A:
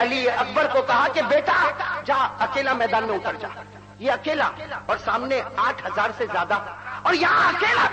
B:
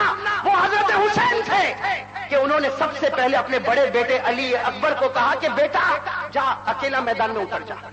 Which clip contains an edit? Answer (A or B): A